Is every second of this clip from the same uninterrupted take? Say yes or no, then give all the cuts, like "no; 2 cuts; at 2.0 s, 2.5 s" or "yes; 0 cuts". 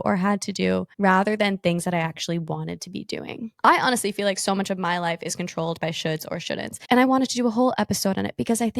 no; 2 cuts; at 3.5 s, 6.8 s